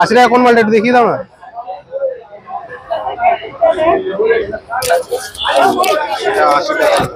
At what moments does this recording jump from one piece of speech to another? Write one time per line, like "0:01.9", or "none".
none